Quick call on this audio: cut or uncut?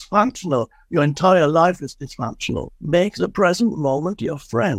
cut